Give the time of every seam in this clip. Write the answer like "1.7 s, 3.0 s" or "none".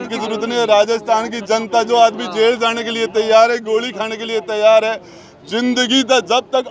none